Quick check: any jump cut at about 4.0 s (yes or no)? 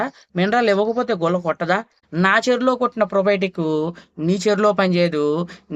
no